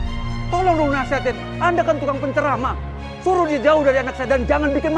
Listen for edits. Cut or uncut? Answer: uncut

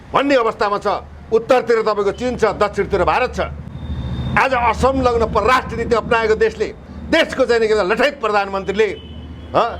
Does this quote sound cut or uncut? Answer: uncut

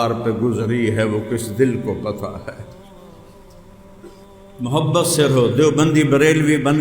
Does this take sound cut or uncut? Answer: cut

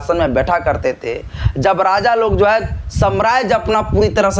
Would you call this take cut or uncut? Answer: uncut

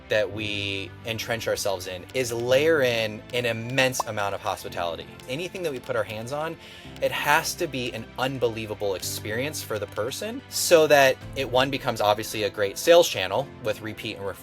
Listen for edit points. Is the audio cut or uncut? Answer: cut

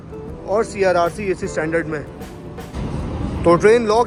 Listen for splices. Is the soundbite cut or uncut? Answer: uncut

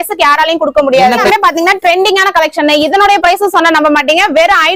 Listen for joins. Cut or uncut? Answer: cut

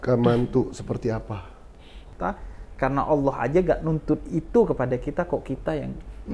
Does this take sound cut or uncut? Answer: cut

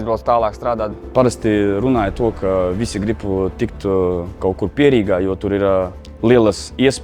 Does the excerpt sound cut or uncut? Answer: cut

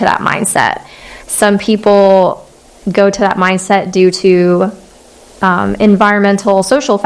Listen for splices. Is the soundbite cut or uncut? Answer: uncut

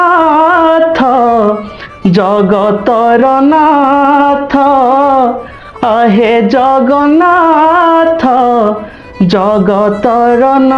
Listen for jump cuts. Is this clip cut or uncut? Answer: uncut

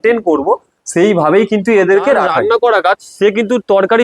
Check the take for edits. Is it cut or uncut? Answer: cut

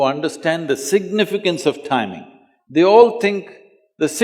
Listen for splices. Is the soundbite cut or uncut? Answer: uncut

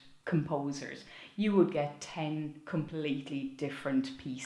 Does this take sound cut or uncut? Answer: uncut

